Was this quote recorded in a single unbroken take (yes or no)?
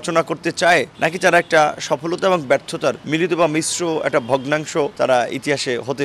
no